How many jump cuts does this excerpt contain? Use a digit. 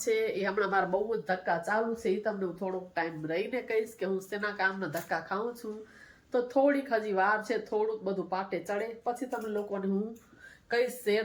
0